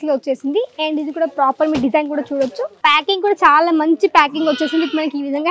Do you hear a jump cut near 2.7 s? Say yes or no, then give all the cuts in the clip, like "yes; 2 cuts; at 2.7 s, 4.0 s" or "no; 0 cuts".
yes; 1 cut; at 2.7 s